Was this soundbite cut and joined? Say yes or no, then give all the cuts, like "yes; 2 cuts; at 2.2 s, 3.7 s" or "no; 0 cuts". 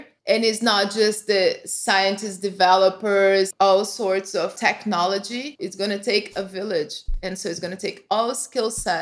yes; 2 cuts; at 3.5 s, 5.6 s